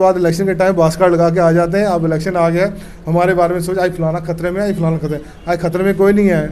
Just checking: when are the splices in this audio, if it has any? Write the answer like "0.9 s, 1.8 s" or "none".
none